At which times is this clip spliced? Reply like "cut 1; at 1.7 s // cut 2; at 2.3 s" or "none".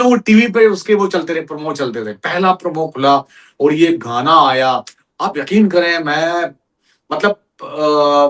none